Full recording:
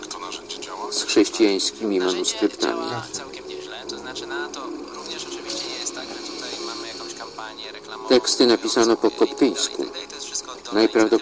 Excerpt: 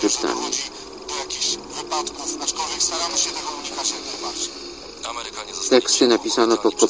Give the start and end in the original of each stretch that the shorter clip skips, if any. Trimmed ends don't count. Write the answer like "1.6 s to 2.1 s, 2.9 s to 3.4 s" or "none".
none